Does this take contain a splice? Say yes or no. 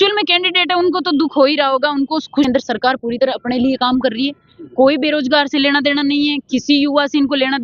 yes